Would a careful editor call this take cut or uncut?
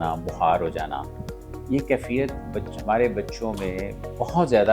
uncut